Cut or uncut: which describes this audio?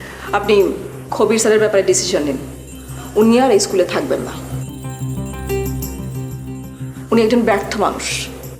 uncut